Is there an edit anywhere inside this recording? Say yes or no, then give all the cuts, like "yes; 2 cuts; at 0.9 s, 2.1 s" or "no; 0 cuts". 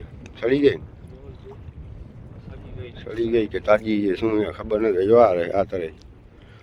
no; 0 cuts